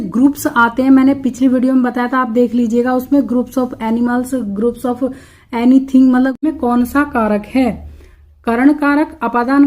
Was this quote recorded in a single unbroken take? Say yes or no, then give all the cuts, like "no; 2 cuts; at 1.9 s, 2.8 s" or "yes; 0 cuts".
no; 1 cut; at 6.5 s